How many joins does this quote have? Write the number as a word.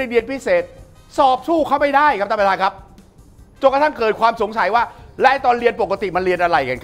zero